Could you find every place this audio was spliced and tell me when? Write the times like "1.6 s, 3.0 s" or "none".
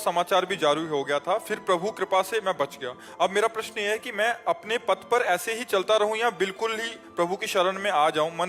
none